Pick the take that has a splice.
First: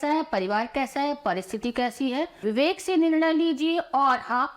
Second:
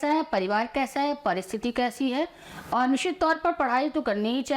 first; 1 cut; at 2.4 s

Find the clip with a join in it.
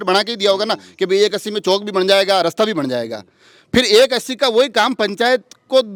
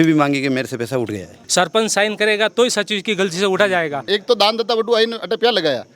second; 2 cuts; at 1.4 s, 4.0 s

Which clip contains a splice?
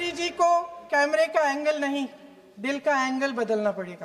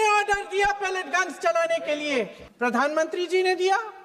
second; 1 cut; at 2.4 s

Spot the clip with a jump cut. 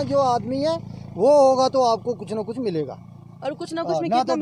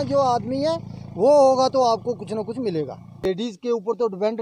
second; 1 cut; at 3.3 s

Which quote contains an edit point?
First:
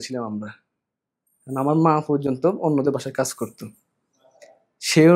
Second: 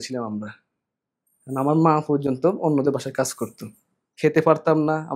second; 1 cut; at 4.0 s

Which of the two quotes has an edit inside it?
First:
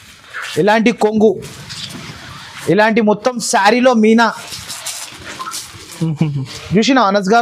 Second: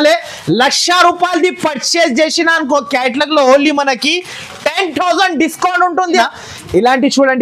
second; 1 cut; at 6.2 s

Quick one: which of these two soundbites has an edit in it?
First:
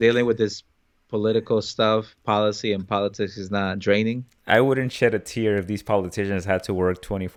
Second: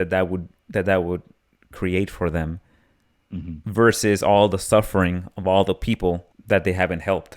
second; 1 cut; at 6.3 s

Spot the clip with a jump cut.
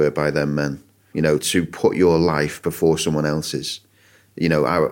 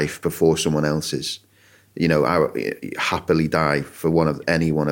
first; 1 cut; at 1.4 s

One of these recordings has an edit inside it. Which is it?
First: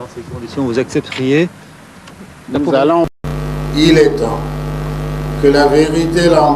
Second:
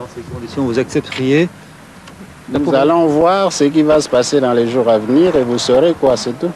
first; 1 cut; at 3.1 s

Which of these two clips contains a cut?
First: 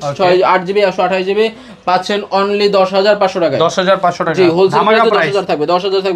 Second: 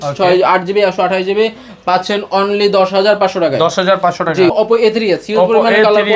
second; 1 cut; at 4.5 s

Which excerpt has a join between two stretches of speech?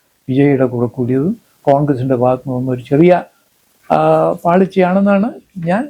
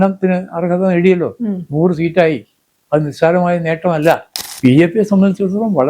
second; 1 cut; at 4.5 s

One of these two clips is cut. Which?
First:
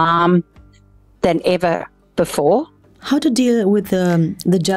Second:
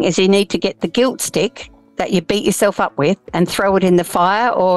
first; 1 cut; at 2.8 s

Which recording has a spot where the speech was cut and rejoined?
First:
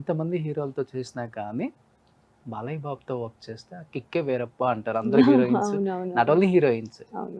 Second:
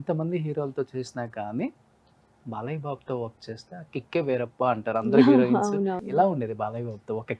second; 1 cut; at 6.0 s

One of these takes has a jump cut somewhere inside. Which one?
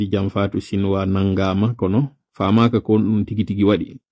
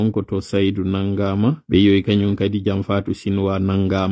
second; 1 cut; at 1.6 s

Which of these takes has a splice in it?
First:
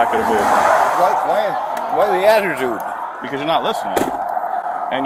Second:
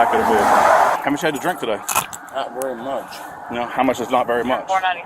second; 2 cuts; at 0.9 s, 1.8 s

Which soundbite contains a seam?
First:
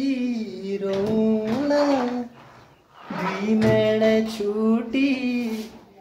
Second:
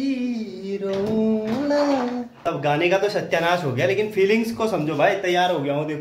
second; 1 cut; at 2.4 s

